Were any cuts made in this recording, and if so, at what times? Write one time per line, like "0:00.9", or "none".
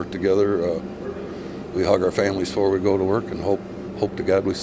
none